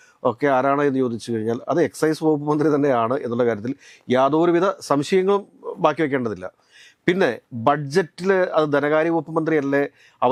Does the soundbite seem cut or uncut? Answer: uncut